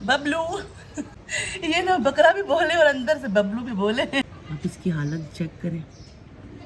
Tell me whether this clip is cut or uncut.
cut